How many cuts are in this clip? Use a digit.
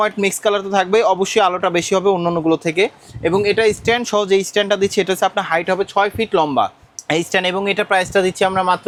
0